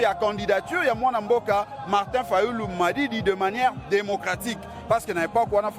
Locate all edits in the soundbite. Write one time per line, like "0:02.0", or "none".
none